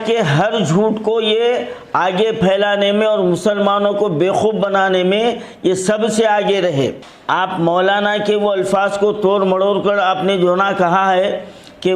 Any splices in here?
yes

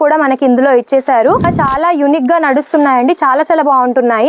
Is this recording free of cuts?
no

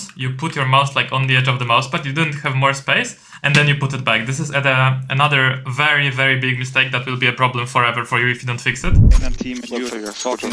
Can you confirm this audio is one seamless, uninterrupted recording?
no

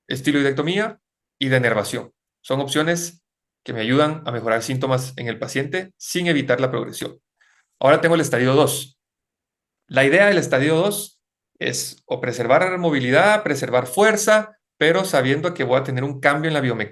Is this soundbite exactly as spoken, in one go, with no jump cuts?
yes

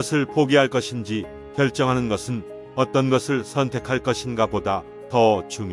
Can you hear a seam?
no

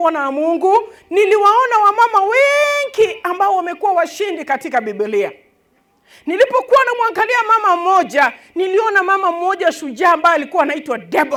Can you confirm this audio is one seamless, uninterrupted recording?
yes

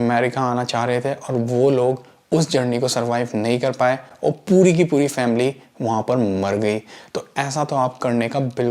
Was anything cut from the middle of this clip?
no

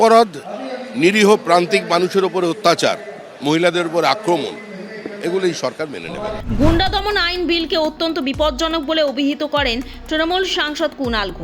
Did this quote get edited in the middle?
no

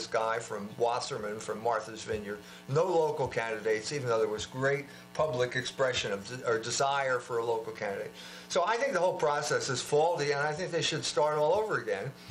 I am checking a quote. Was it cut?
no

